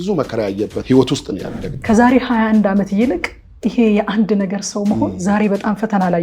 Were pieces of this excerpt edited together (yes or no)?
yes